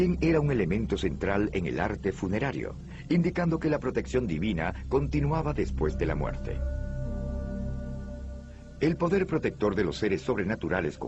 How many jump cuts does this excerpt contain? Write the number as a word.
one